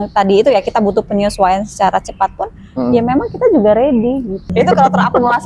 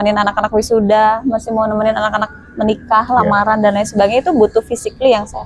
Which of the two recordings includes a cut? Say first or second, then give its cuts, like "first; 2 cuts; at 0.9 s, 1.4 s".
first; 1 cut; at 4.4 s